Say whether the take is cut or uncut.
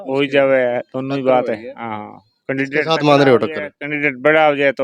uncut